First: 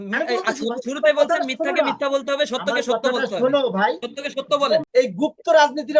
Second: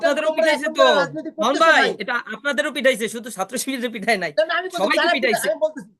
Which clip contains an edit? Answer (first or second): first